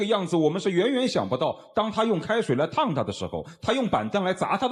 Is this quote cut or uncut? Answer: uncut